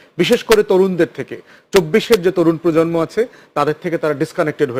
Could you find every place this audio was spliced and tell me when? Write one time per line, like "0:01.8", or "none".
none